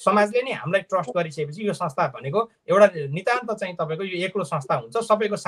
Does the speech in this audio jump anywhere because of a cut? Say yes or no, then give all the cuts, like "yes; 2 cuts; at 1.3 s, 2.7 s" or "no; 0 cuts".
no; 0 cuts